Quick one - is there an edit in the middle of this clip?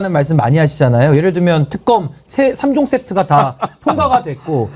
no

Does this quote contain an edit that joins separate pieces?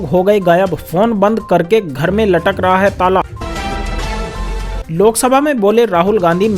yes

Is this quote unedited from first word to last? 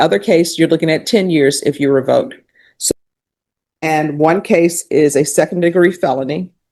no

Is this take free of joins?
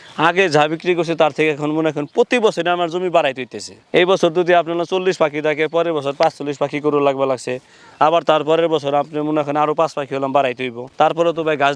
yes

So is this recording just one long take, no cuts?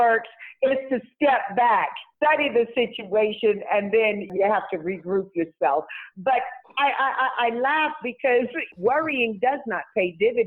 no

